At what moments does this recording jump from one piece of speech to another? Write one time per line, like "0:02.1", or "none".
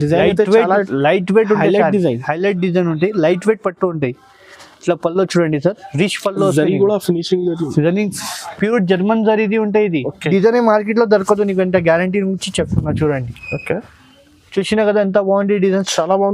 0:10.3